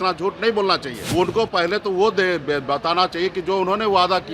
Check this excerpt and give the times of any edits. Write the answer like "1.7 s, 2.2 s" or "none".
0.9 s